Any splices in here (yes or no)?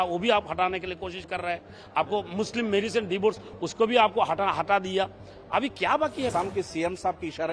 yes